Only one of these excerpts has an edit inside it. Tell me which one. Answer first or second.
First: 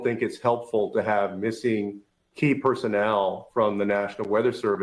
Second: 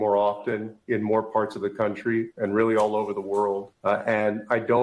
second